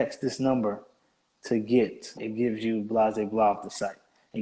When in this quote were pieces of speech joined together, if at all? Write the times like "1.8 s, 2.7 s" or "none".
2.2 s